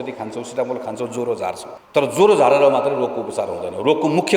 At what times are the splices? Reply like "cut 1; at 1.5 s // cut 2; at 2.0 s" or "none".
cut 1; at 1.7 s